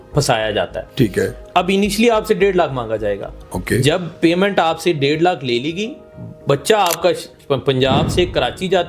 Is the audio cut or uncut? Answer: uncut